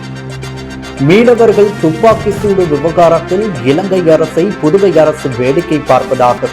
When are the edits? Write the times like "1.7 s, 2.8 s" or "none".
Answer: 1.0 s